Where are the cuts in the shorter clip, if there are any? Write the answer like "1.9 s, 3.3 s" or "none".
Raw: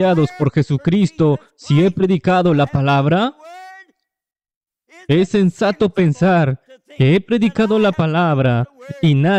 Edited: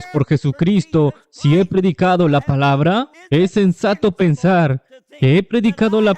3.2 s